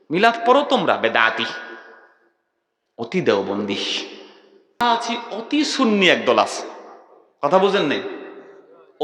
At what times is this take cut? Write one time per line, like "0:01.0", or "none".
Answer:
0:04.8